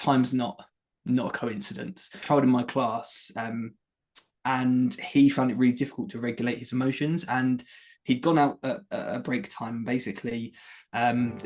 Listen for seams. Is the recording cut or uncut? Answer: cut